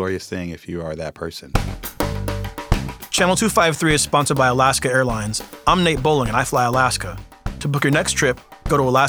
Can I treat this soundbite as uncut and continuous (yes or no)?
no